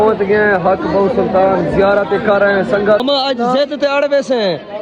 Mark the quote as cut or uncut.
cut